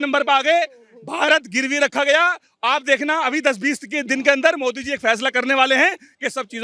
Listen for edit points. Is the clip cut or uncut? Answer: uncut